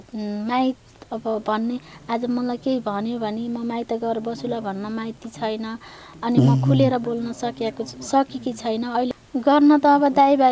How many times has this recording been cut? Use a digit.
1